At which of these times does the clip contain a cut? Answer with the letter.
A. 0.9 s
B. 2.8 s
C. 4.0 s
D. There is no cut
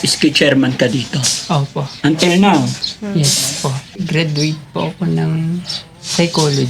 C